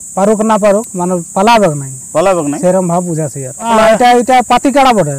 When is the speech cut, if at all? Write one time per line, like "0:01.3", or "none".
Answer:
0:03.7

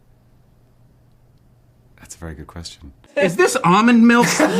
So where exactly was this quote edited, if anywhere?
0:03.1

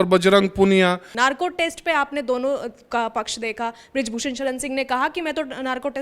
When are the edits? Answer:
0:01.1

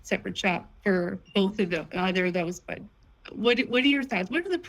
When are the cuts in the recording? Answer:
0:01.2

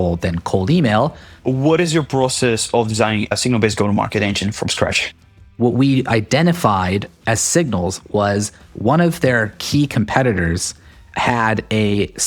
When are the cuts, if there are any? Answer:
0:01.3
0:03.3
0:05.5

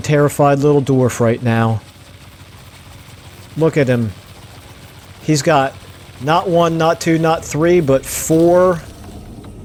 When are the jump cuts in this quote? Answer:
none

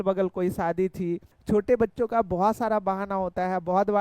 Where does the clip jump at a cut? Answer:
0:01.3

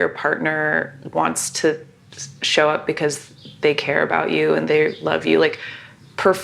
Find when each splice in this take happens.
0:04.6

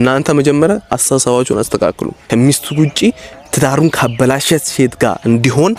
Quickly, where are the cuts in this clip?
0:02.1

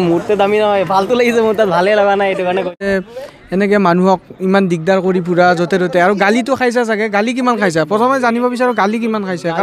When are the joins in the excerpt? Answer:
0:02.8

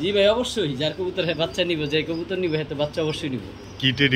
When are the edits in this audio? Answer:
none

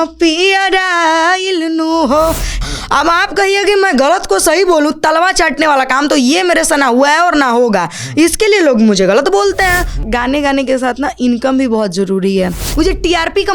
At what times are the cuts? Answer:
0:02.6
0:10.0
0:12.6

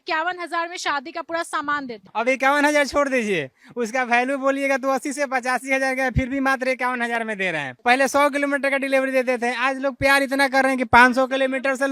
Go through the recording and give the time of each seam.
none

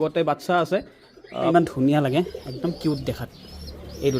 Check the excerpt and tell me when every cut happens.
0:01.5

